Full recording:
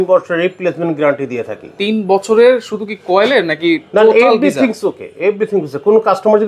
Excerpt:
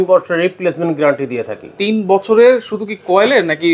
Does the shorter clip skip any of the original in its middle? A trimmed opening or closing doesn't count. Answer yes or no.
no